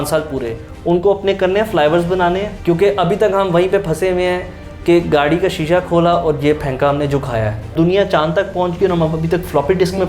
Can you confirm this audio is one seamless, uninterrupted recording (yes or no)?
no